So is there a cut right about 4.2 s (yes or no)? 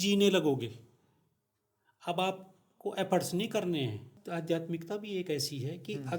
yes